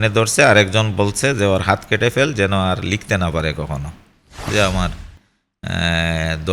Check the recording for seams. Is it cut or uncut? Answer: cut